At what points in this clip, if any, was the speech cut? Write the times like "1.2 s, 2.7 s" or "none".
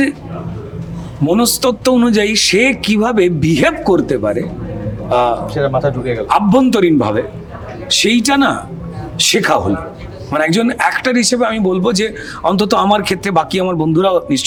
none

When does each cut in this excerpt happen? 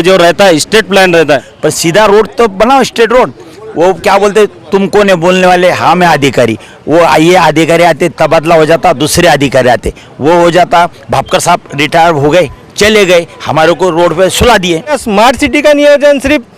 1.5 s, 15.0 s

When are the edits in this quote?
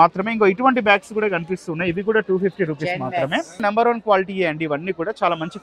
3.6 s

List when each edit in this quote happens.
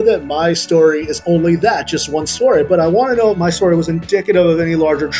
3.4 s

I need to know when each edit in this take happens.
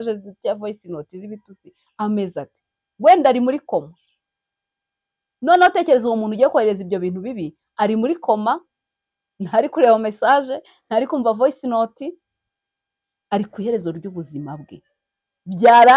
none

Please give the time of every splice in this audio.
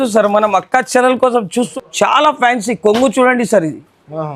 1.7 s

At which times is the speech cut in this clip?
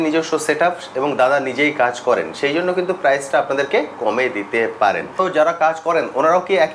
5.2 s

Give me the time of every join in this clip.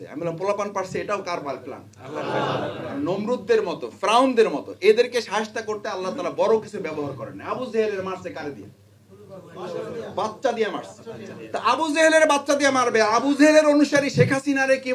none

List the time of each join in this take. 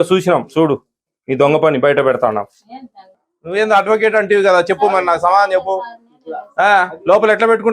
3.1 s

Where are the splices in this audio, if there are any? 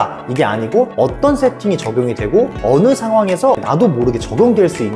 0.9 s, 2.6 s, 3.6 s

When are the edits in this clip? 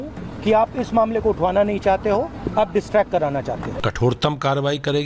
3.8 s

